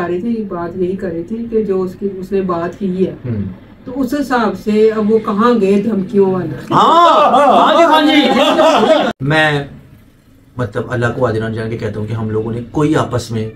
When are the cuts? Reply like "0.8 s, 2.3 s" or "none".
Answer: 9.1 s

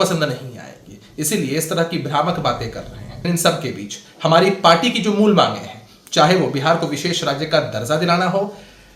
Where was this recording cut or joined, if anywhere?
3.2 s

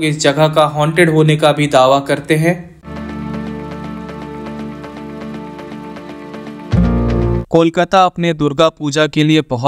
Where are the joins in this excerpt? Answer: none

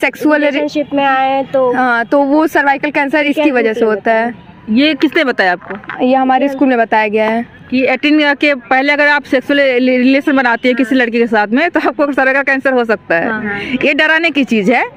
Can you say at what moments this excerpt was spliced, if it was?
none

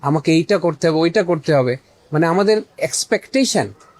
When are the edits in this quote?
2.8 s

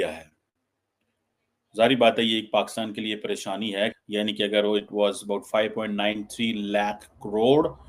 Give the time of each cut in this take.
3.9 s

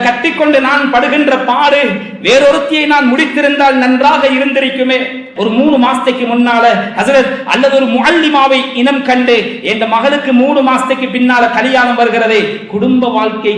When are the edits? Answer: 5.3 s

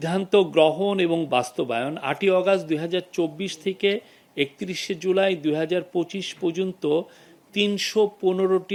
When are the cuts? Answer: none

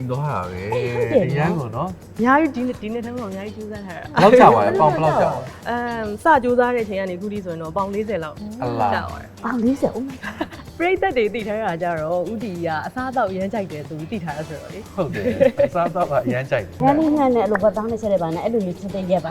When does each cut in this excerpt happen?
2.0 s, 10.5 s, 16.7 s

